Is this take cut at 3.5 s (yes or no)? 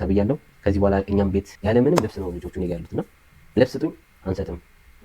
no